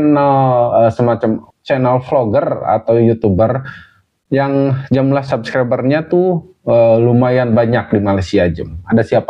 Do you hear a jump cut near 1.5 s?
yes; 1 cut; at 1.5 s

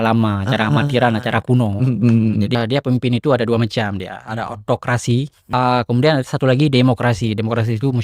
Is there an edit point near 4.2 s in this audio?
no; 2 cuts; at 2.5 s, 5.4 s

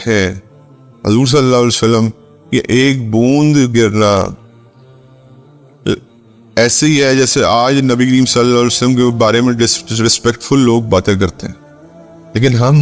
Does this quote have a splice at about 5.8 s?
yes; 2 cuts; at 4.4 s, 5.8 s

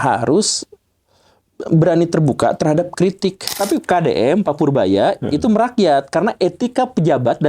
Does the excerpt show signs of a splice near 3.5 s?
yes; 1 cut; at 3.5 s

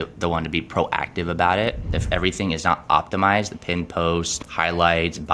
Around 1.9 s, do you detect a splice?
yes; 2 cuts; at 1.9 s, 4.4 s

